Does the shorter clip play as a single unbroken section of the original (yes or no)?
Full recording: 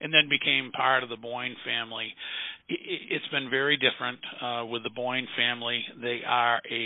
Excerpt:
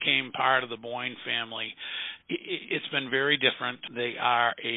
no